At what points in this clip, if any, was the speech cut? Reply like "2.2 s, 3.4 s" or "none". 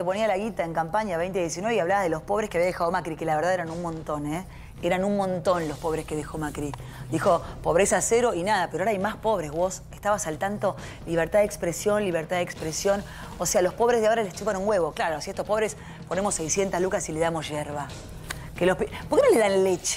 none